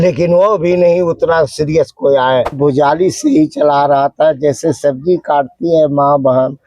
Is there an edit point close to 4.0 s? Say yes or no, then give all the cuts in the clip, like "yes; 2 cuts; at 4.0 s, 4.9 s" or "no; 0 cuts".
no; 1 cut; at 2.6 s